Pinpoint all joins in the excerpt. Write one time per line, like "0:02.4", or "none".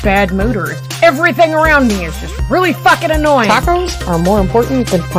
none